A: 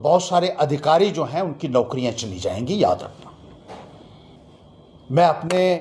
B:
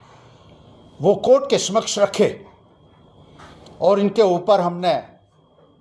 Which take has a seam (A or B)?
A